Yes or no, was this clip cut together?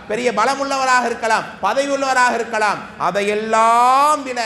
no